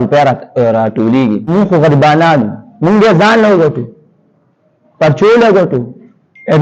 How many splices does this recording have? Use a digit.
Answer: 1